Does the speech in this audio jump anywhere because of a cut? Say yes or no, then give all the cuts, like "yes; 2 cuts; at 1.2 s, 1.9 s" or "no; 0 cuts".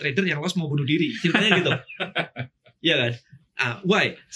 no; 0 cuts